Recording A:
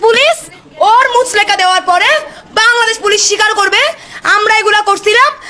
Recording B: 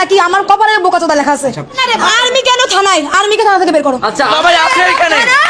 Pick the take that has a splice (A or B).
B